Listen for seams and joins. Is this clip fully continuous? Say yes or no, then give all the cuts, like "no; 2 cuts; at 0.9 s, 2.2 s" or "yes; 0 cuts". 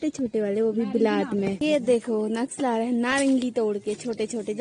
no; 1 cut; at 1.6 s